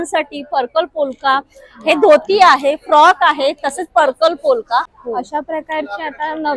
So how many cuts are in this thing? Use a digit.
1